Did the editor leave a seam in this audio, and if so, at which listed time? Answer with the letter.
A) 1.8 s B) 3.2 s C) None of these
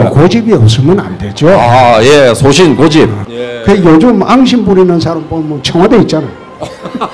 B